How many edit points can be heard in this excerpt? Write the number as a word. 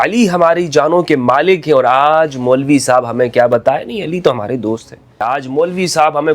one